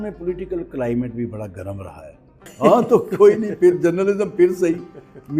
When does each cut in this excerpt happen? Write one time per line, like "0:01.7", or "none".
0:02.5